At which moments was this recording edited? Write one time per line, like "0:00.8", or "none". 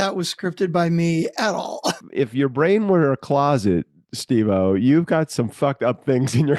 0:02.0